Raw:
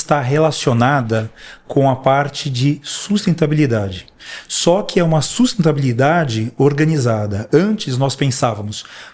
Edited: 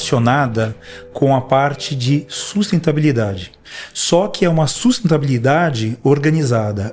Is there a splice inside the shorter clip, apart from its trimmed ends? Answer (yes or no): no